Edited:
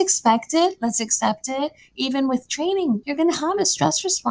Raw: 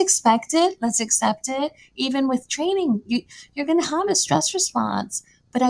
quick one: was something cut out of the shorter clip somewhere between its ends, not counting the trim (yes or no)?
yes